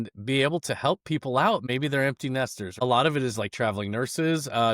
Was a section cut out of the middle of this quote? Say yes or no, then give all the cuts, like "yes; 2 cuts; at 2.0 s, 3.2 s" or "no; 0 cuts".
yes; 2 cuts; at 1.6 s, 2.8 s